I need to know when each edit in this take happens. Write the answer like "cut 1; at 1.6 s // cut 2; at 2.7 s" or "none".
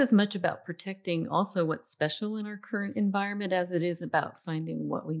none